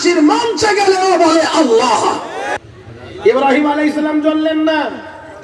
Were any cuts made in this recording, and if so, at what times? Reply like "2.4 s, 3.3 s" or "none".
2.5 s